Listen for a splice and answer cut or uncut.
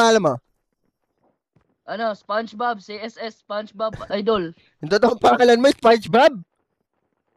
uncut